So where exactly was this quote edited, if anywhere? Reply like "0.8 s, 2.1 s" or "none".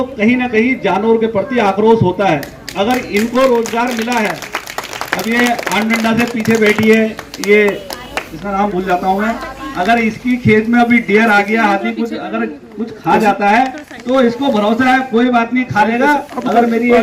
none